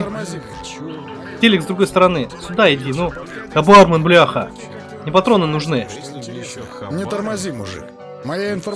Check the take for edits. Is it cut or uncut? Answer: uncut